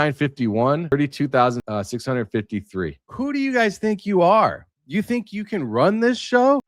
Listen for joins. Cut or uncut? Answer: cut